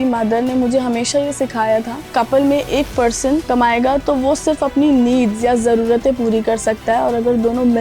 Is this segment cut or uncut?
cut